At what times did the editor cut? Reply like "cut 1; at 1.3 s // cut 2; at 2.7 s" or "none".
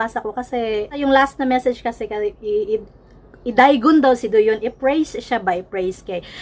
none